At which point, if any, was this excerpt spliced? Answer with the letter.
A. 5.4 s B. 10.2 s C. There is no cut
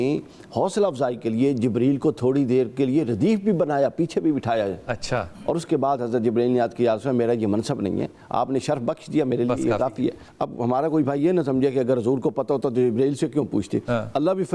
B